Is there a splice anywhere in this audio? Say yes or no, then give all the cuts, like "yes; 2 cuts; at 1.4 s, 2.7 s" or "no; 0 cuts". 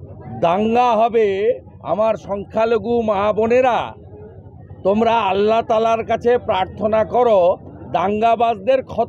no; 0 cuts